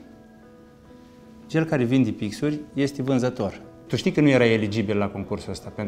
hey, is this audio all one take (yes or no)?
no